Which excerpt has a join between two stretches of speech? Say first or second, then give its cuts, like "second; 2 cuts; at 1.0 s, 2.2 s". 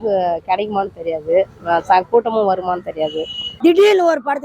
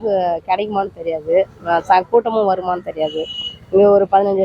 first; 1 cut; at 3.4 s